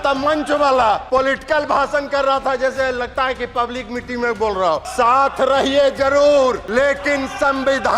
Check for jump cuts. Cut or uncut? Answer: cut